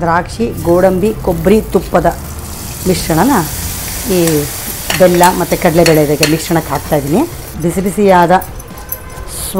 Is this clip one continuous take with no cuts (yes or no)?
no